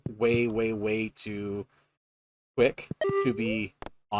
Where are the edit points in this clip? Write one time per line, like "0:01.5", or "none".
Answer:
0:03.0